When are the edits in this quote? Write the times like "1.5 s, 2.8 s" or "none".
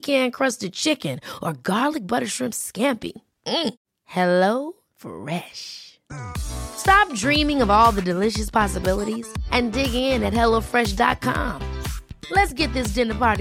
none